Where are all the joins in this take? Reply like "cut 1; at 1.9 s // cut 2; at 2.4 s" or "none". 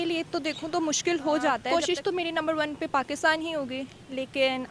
cut 1; at 1.6 s